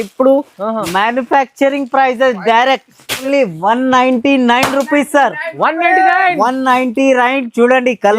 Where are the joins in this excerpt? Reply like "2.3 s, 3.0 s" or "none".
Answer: 3.2 s